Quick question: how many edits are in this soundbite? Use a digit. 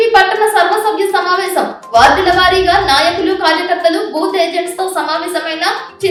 0